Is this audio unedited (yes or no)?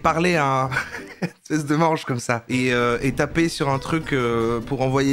yes